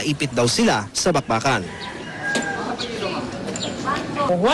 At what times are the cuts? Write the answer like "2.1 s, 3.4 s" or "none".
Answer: 3.2 s